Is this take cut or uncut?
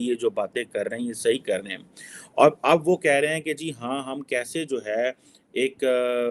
uncut